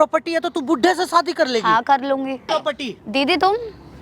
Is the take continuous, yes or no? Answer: no